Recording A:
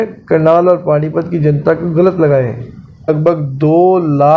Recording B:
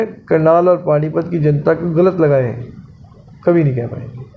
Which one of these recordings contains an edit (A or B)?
A